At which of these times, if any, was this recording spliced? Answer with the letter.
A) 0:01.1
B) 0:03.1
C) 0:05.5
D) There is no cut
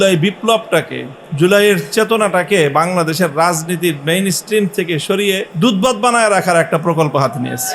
C